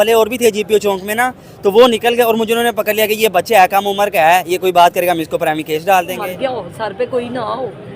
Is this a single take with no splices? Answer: no; 1 cut; at 6.2 s

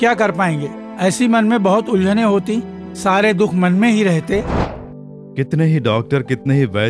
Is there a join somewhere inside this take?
yes; 1 cut; at 4.6 s

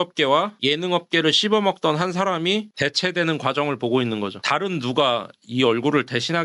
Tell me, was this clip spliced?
no; 0 cuts

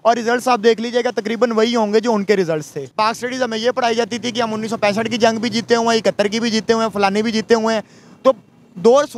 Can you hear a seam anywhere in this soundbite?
yes; 1 cut; at 2.8 s

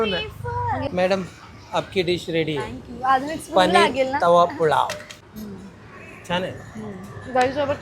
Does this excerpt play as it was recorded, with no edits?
no; 2 cuts; at 0.8 s, 5.2 s

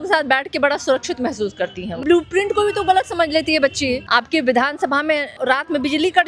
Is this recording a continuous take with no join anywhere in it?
no; 3 cuts; at 2.0 s, 4.0 s, 5.4 s

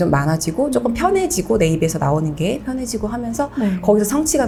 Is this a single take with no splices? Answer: yes; 0 cuts

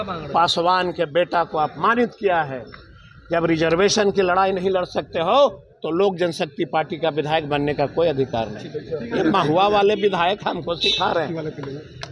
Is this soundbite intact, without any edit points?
yes; 0 cuts

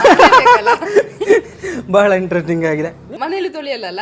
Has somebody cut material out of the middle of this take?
yes; 1 cut; at 3.1 s

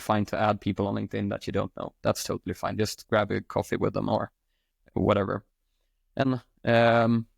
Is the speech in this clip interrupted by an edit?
yes; 1 cut; at 6.2 s

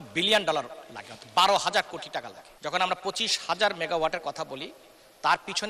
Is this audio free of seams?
no; 1 cut; at 2.4 s

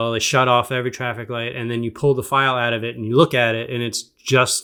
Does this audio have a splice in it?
no; 0 cuts

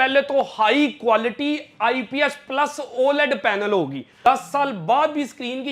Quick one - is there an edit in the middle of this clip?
yes; 1 cut; at 4.2 s

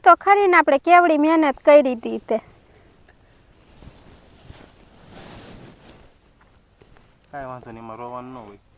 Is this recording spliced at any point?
no; 0 cuts

